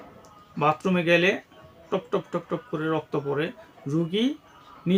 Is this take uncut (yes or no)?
yes